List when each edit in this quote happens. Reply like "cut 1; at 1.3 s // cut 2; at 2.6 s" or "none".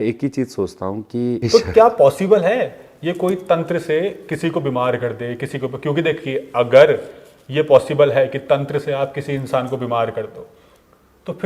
cut 1; at 1.5 s